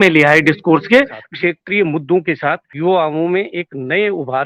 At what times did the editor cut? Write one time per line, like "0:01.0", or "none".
0:01.2
0:02.7